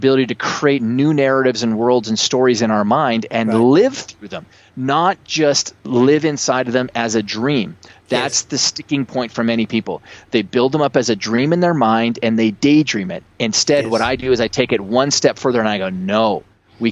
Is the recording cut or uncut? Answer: uncut